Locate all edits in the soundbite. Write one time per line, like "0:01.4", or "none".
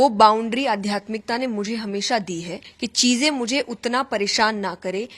0:02.6